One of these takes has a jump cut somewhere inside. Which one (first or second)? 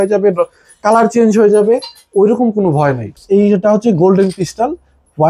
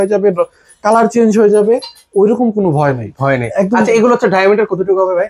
first